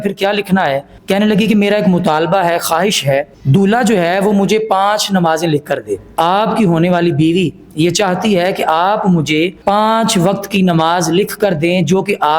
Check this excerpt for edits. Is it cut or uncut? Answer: cut